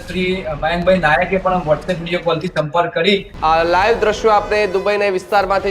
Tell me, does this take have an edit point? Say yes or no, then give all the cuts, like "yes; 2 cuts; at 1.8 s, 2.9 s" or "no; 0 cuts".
yes; 1 cut; at 3.3 s